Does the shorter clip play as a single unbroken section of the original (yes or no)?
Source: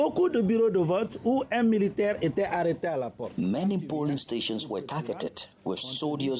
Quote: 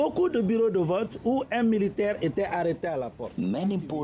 yes